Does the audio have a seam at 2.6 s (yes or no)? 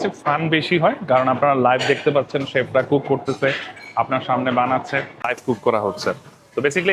no